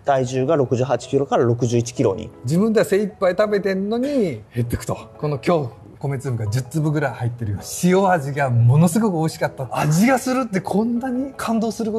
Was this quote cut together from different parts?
yes; 4 cuts; at 2.3 s, 5.9 s, 7.7 s, 9.6 s

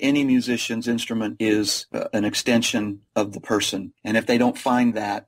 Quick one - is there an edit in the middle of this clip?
no; 0 cuts

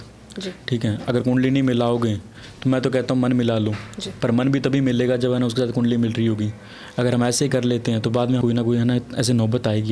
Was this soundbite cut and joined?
yes; 1 cut; at 8.4 s

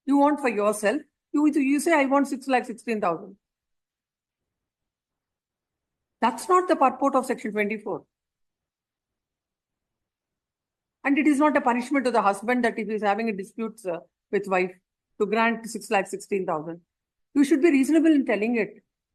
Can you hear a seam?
no; 0 cuts

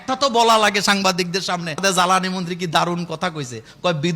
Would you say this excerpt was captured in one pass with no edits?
no; 1 cut; at 1.8 s

